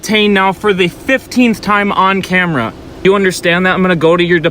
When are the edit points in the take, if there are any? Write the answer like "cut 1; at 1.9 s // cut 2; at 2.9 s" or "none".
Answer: cut 1; at 3.0 s